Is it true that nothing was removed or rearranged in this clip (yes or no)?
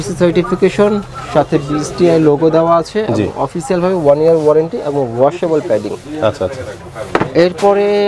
yes